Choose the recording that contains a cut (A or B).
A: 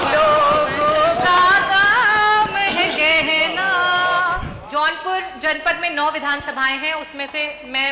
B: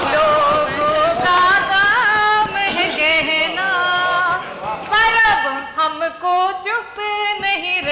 A